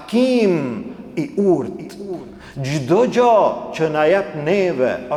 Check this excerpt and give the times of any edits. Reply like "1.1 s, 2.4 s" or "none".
none